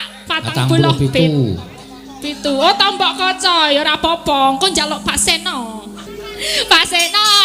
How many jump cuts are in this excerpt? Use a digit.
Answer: 1